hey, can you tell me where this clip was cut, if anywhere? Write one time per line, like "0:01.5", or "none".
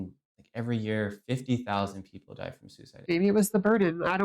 0:03.0